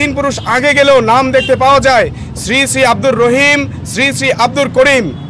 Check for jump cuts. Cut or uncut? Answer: uncut